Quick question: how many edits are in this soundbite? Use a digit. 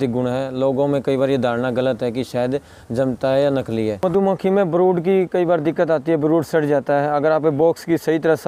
1